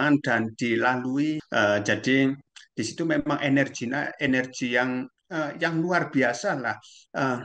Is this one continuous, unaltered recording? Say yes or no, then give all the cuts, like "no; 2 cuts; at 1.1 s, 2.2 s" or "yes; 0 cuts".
no; 1 cut; at 1.4 s